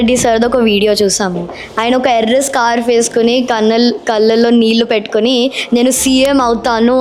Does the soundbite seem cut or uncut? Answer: uncut